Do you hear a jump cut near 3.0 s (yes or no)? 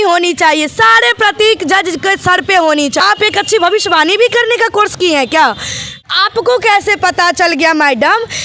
yes